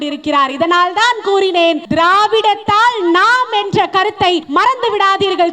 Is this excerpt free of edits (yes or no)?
no